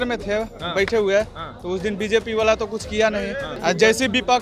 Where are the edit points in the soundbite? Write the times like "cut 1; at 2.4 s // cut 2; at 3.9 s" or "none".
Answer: cut 1; at 3.5 s